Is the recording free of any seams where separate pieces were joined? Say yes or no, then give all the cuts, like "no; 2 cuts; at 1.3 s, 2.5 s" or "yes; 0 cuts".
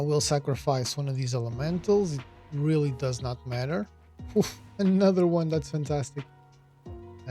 yes; 0 cuts